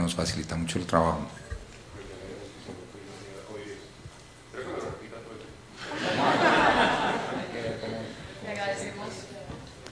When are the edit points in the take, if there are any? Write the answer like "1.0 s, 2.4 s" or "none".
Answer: 6.7 s